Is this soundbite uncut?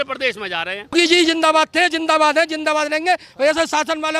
no; 1 cut; at 0.9 s

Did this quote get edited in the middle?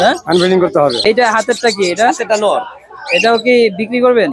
yes; 1 cut; at 1.1 s

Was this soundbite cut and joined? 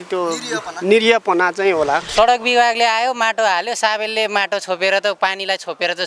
yes; 1 cut; at 2.1 s

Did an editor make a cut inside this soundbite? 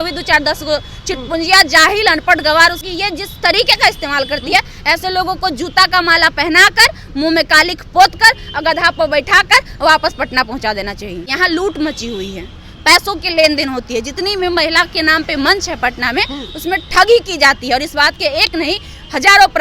yes; 2 cuts; at 2.8 s, 11.3 s

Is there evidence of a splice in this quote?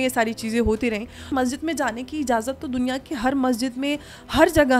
yes; 1 cut; at 1.3 s

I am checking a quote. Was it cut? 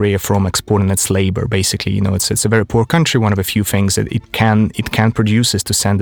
no; 0 cuts

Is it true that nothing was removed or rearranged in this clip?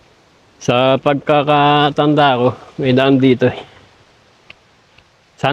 yes; 0 cuts

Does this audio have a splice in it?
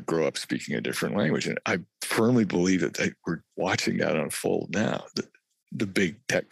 no; 0 cuts

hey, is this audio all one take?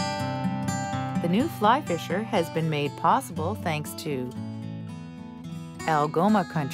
no; 3 cuts; at 1.2 s, 4.3 s, 5.5 s

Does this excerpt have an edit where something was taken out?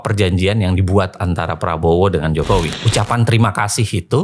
yes; 1 cut; at 2.8 s

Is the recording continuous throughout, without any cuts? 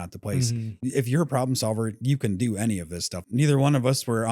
no; 1 cut; at 3.2 s

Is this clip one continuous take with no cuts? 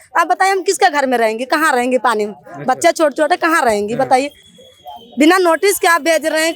yes; 0 cuts

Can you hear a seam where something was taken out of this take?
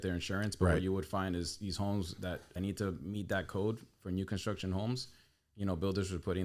yes; 1 cut; at 2.4 s

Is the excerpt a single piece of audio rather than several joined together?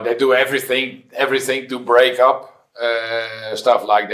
yes; 0 cuts

